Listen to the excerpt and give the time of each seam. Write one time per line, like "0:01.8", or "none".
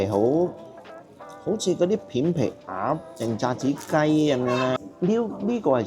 0:04.8